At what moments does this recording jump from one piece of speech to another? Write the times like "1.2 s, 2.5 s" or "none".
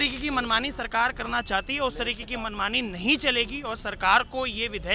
none